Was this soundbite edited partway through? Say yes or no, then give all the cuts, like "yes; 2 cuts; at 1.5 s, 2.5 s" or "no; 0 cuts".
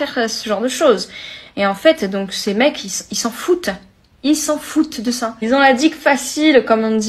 no; 0 cuts